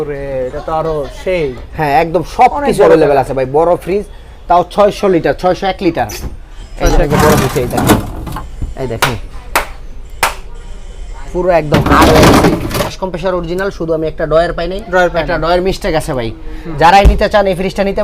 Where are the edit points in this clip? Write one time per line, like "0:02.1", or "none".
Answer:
0:07.0
0:12.9